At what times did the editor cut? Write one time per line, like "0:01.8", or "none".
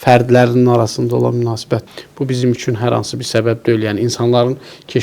0:01.9

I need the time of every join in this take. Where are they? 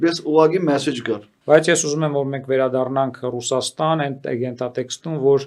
0:01.3

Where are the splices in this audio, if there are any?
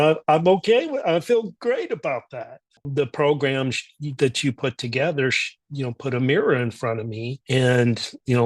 0:02.8

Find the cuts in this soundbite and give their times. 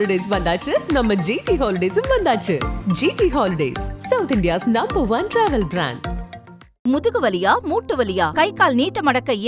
none

